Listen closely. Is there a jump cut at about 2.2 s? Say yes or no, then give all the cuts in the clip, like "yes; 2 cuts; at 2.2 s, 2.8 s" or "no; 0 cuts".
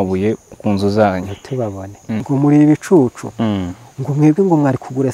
yes; 1 cut; at 2.2 s